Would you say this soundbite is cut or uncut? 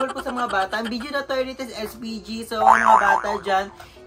uncut